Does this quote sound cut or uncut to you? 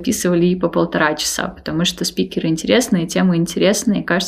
uncut